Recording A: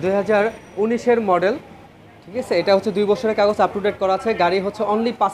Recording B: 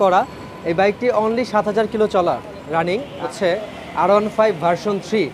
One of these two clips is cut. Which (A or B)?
B